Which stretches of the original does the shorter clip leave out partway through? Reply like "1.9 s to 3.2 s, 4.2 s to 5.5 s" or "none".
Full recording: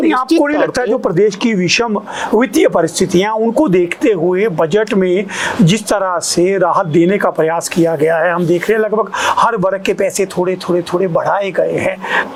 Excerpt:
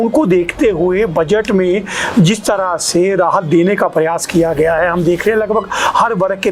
none